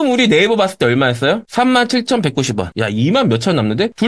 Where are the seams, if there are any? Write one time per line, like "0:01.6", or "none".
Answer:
0:02.7